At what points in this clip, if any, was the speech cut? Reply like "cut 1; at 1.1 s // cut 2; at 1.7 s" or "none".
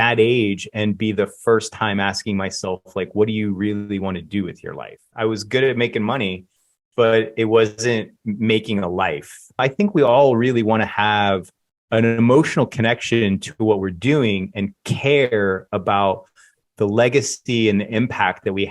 cut 1; at 5.1 s // cut 2; at 9.6 s